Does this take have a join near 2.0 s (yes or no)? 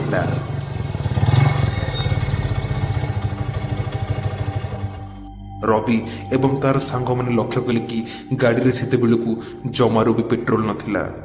no